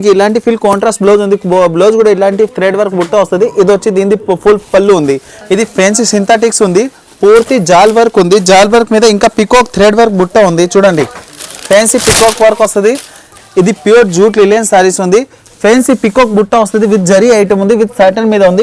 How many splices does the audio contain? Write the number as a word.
two